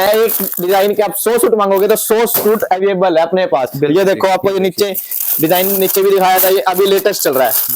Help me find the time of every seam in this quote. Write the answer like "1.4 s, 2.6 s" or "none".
none